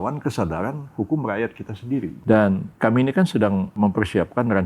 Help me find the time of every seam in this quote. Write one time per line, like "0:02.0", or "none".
0:02.1
0:02.7
0:03.7